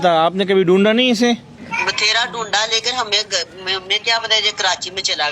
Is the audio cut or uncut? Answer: cut